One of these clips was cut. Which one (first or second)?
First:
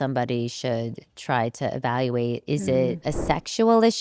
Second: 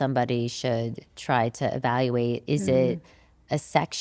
first